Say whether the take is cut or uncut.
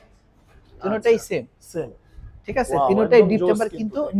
uncut